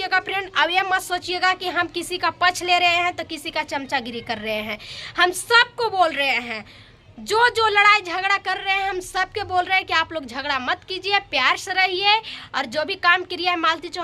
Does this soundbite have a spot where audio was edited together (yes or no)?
no